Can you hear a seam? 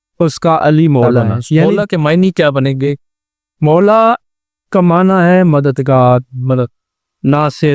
yes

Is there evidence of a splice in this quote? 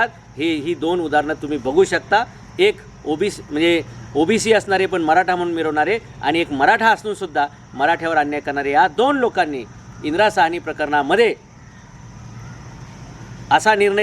no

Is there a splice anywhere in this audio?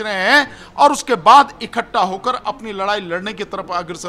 no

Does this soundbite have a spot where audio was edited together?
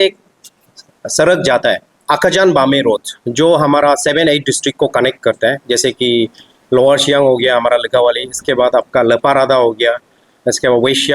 yes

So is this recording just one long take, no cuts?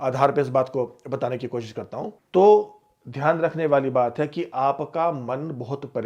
no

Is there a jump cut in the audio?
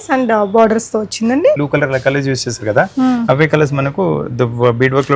yes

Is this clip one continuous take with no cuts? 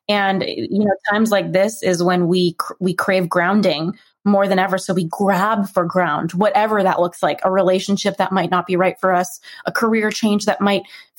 yes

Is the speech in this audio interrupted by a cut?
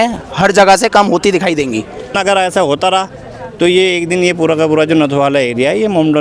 yes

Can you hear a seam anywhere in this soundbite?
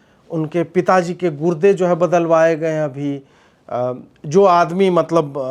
no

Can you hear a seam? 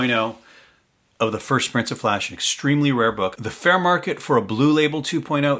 yes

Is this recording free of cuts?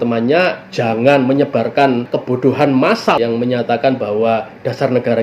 no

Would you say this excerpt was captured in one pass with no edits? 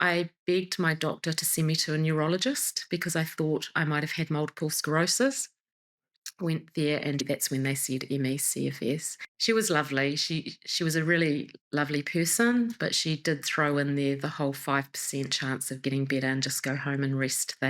no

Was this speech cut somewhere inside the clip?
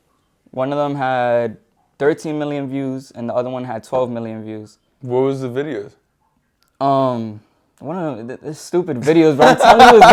no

